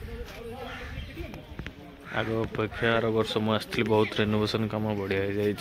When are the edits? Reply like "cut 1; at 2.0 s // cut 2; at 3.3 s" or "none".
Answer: none